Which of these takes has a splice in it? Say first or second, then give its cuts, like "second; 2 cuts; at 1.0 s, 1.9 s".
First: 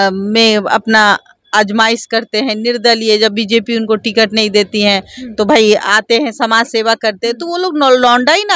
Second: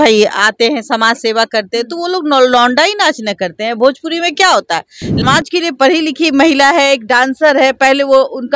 second; 1 cut; at 5.2 s